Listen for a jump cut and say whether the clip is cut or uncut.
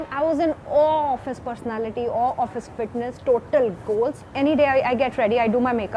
cut